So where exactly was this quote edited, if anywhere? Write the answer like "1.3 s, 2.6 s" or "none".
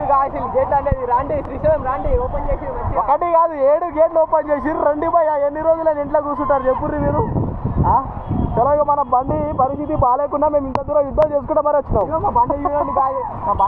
none